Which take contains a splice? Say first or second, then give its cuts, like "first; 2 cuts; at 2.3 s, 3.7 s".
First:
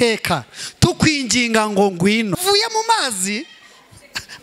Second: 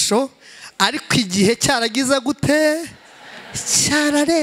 first; 1 cut; at 2.4 s